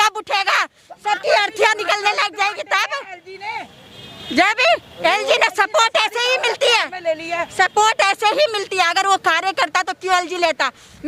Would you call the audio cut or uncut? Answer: uncut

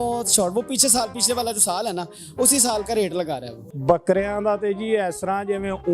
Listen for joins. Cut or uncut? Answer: cut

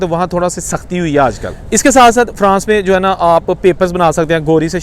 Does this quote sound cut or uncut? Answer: cut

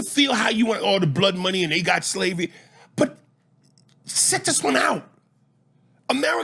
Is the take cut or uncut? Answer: uncut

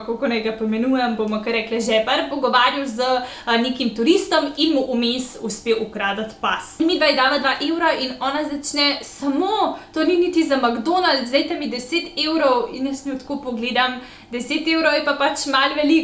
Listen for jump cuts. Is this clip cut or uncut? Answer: cut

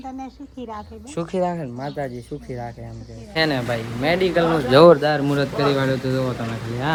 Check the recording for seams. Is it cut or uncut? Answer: uncut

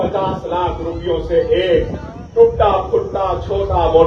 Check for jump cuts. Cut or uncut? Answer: uncut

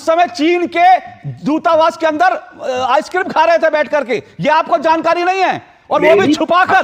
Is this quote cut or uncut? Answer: uncut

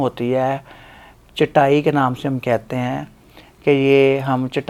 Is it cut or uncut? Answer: uncut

